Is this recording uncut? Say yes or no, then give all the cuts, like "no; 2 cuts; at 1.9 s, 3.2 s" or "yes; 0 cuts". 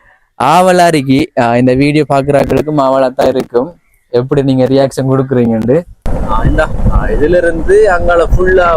no; 1 cut; at 6.1 s